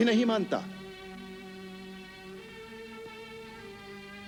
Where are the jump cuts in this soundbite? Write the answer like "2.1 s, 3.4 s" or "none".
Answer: none